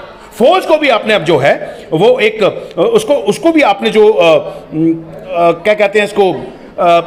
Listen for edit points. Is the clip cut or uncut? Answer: uncut